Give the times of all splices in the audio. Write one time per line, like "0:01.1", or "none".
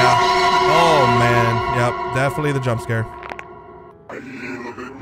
0:04.1